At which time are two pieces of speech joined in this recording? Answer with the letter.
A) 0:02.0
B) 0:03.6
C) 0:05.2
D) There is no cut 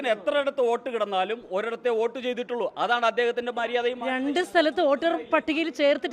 D